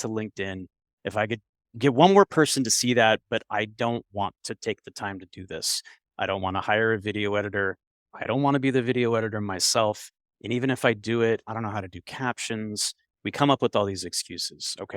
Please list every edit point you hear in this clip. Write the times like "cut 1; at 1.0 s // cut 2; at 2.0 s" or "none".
none

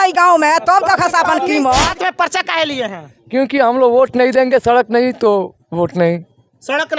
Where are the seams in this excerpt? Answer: cut 1; at 1.9 s

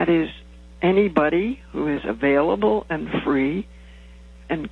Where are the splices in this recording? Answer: none

